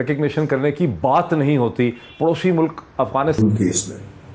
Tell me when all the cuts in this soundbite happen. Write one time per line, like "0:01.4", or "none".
0:03.4